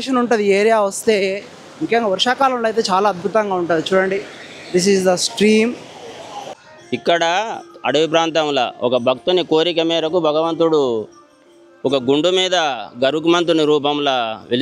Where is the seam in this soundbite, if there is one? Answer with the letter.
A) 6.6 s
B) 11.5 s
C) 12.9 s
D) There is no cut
A